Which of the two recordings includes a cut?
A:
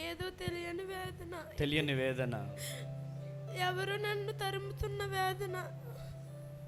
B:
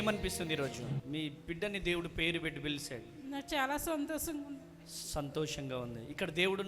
B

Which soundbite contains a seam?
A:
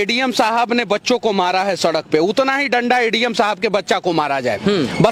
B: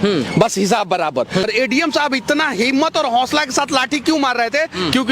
B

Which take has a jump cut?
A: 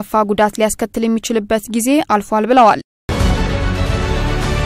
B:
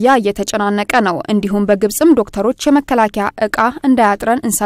A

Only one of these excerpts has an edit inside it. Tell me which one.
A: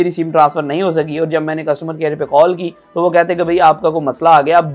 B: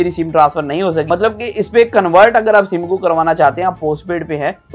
B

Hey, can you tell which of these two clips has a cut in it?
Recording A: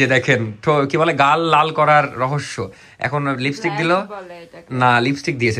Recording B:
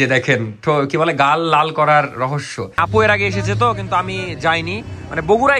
B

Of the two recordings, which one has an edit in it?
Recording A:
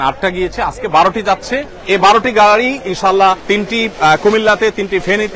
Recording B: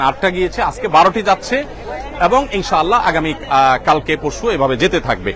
A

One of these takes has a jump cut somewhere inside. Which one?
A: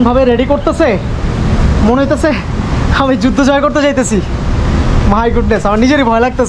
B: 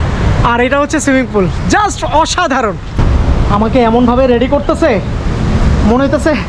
B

